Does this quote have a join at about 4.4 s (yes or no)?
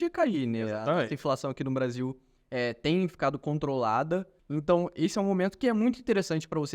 yes